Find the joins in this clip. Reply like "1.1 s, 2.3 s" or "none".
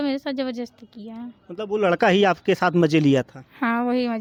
none